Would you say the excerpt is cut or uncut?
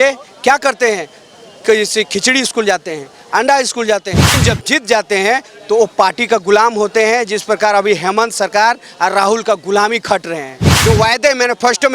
cut